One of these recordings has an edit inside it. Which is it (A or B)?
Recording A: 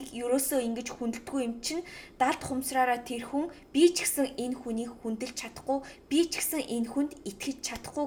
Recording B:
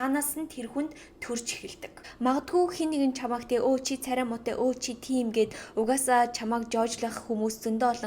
B